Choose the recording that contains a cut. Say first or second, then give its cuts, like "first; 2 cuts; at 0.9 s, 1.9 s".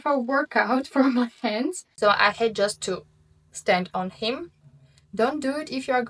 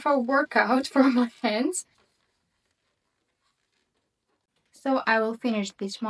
first; 1 cut; at 1.8 s